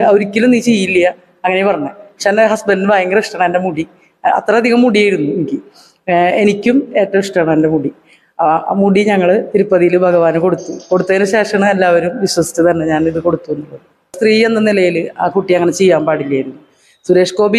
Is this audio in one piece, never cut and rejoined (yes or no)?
no